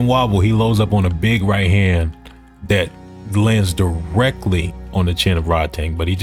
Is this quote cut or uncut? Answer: uncut